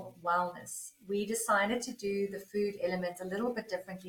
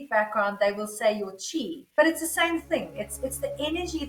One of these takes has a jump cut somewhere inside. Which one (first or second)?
second